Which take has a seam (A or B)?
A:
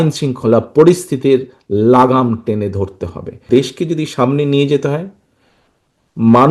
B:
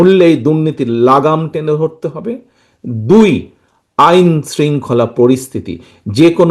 A